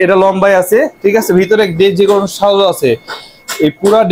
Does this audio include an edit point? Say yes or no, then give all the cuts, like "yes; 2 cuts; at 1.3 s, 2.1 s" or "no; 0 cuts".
no; 0 cuts